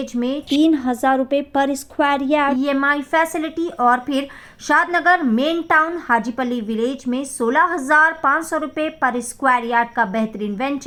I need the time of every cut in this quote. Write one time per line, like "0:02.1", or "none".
none